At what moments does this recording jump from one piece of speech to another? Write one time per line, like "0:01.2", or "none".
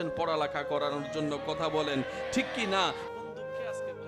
0:02.9